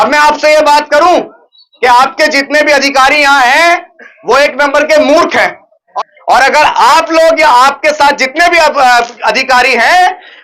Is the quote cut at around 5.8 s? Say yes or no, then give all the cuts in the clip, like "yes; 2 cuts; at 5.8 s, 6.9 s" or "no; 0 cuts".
yes; 1 cut; at 5.8 s